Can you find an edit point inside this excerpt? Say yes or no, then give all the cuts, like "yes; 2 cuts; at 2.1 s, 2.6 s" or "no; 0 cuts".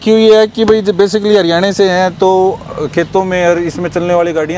no; 0 cuts